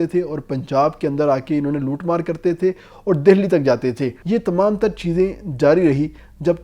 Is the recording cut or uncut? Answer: cut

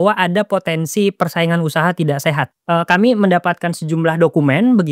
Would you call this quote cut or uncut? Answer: cut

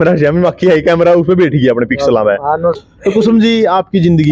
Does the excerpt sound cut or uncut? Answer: cut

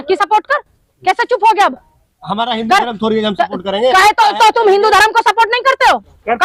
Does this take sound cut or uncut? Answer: uncut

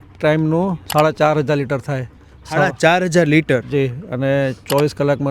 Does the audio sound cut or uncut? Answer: uncut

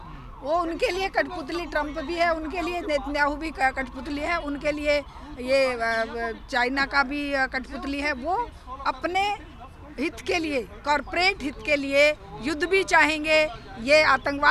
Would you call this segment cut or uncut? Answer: uncut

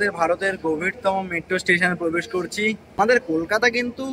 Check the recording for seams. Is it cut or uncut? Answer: cut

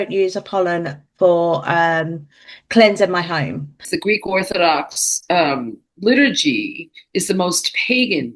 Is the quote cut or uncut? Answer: cut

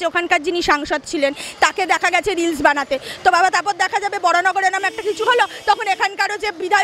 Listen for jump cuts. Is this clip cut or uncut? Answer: uncut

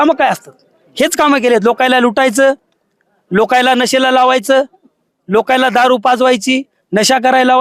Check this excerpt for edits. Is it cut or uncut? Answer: uncut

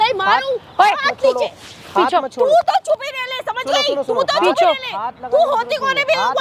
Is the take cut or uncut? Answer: uncut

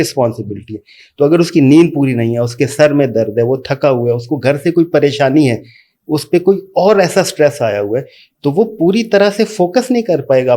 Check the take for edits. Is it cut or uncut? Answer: uncut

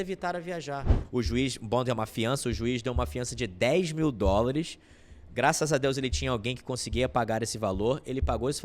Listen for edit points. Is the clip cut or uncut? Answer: cut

